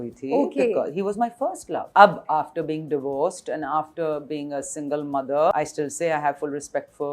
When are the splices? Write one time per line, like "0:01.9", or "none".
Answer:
0:01.9
0:05.5